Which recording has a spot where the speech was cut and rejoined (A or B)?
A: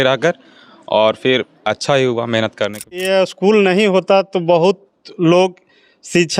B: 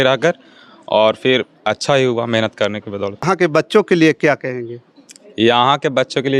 A